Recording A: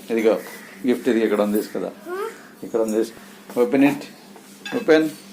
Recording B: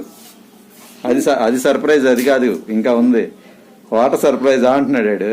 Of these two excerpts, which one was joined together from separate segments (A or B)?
A